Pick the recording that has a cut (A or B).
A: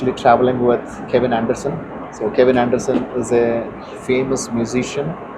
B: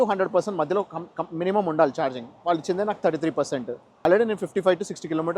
B